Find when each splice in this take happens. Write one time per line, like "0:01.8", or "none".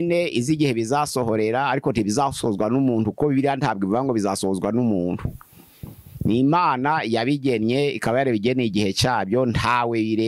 none